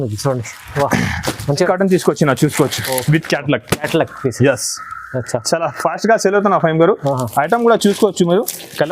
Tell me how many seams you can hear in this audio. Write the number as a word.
one